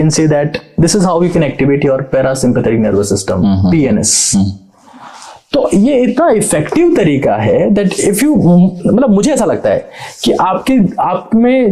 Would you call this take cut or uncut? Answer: uncut